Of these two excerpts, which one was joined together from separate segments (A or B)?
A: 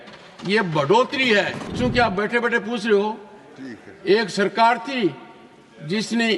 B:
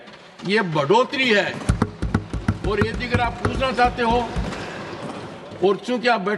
A